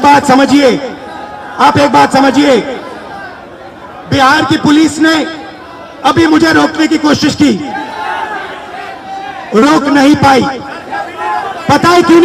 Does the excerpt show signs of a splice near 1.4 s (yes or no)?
no